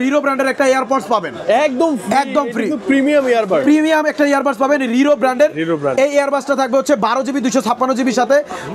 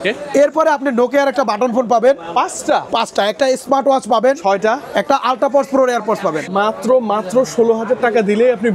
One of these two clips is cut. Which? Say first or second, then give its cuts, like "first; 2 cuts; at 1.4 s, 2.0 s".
second; 1 cut; at 6.4 s